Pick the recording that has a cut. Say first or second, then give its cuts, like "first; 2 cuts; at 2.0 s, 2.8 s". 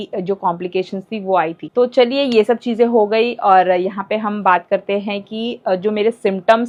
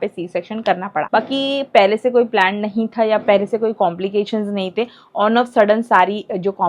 second; 1 cut; at 1.1 s